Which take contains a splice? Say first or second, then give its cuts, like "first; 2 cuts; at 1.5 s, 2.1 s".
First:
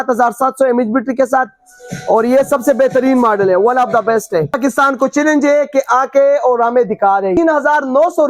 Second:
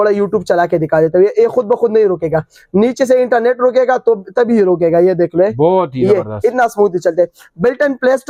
first; 2 cuts; at 4.6 s, 7.4 s